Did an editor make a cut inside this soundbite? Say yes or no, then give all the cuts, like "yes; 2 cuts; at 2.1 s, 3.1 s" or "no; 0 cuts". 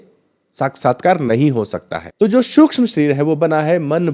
yes; 1 cut; at 2.0 s